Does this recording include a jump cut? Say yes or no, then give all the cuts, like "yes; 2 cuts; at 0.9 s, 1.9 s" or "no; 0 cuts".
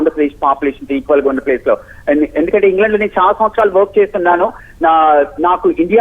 yes; 1 cut; at 1.4 s